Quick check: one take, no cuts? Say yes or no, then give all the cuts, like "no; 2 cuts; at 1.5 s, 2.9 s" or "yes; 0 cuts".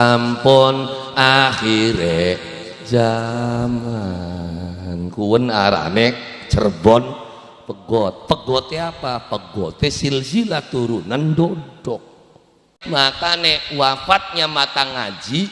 no; 1 cut; at 12.7 s